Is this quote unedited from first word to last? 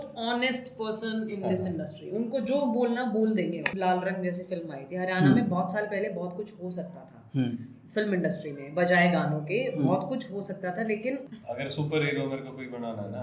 no; 2 cuts; at 3.7 s, 11.3 s

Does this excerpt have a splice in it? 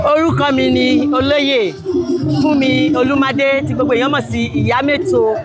no; 0 cuts

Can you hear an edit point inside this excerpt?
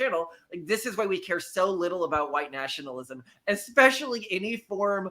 no; 0 cuts

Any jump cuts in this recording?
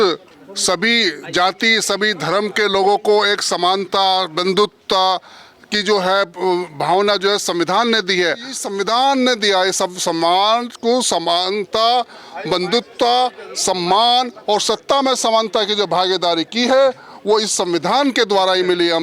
yes; 1 cut; at 8.6 s

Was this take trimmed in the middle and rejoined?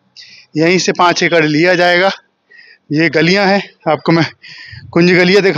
no; 0 cuts

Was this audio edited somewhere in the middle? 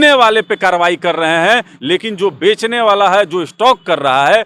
no; 0 cuts

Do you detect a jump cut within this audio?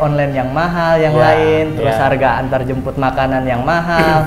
no; 0 cuts

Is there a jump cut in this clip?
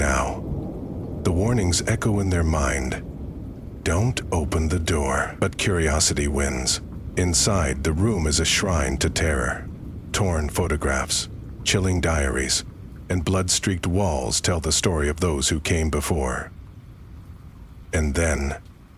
no; 0 cuts

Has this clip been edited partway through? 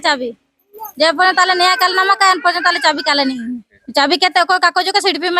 yes; 1 cut; at 3.8 s

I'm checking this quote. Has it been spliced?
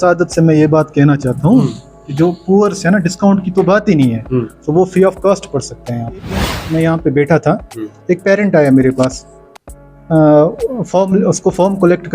yes; 1 cut; at 6.6 s

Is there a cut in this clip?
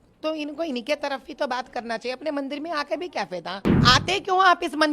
yes; 1 cut; at 3.8 s

